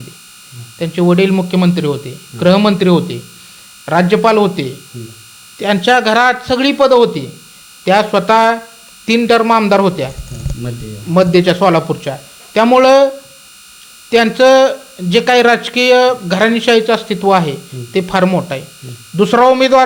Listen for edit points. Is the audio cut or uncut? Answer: uncut